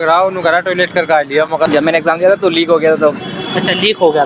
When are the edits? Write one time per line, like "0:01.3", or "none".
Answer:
0:01.7